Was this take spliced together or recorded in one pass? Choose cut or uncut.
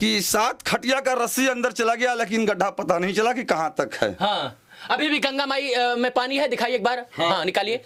uncut